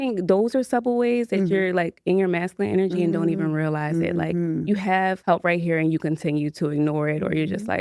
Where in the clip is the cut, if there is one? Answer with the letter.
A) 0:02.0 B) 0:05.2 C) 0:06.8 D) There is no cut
B